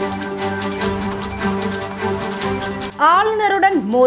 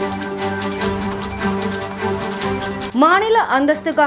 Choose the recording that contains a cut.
second; 1 cut; at 2.9 s

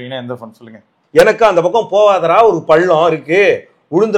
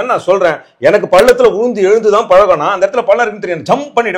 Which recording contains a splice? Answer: first; 1 cut; at 0.9 s

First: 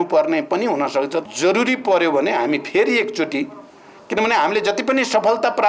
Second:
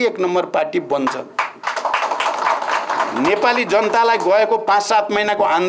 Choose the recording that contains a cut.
first; 1 cut; at 1.2 s

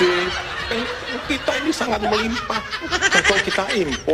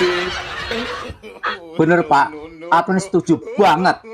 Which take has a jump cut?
first; 1 cut; at 0.9 s

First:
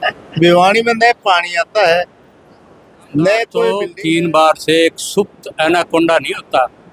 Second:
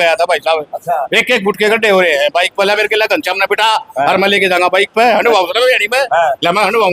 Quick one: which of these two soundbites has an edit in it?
first; 1 cut; at 3.9 s

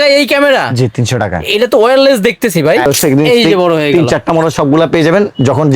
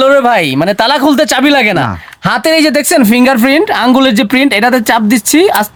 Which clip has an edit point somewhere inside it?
first; 1 cut; at 2.9 s

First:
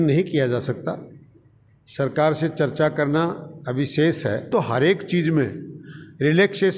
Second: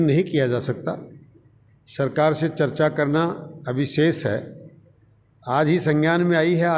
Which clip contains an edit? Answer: first; 1 cut; at 4.5 s

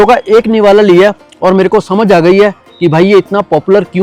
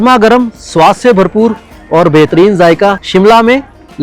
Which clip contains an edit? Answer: second; 1 cut; at 3.0 s

